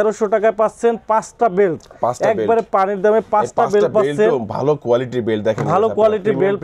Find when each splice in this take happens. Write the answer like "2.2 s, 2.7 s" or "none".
none